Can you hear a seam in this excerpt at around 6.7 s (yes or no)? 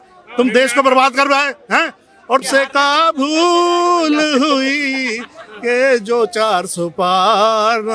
no